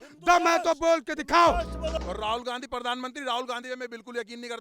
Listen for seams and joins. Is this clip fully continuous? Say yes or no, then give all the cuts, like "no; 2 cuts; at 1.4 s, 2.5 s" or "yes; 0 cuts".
no; 1 cut; at 1.9 s